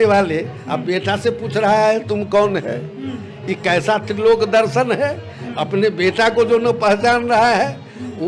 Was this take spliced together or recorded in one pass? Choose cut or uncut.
uncut